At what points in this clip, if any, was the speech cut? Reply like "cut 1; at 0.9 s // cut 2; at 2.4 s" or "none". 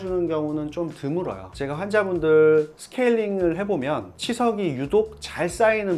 cut 1; at 1.4 s